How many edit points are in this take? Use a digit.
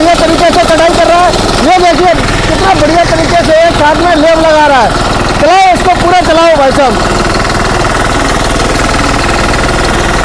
0